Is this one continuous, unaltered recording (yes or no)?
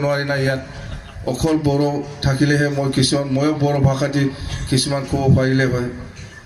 yes